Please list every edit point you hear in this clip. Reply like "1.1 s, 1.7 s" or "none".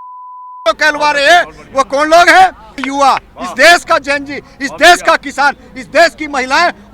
2.8 s